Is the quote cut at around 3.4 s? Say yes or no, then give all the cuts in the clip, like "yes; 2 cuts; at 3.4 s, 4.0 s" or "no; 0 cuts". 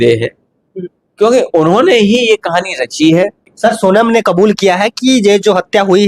yes; 1 cut; at 3.4 s